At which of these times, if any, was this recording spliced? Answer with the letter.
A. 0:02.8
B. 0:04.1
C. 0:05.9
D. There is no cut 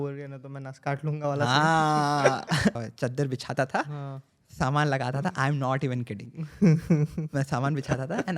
A